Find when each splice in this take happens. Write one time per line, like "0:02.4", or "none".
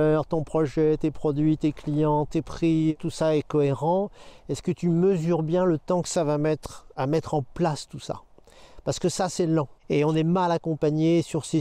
none